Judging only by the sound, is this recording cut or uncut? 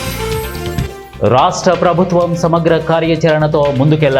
cut